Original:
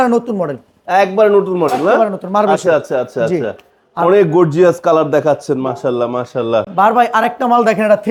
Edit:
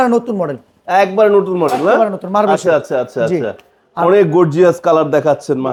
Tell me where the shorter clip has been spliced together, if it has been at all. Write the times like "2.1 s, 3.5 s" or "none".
none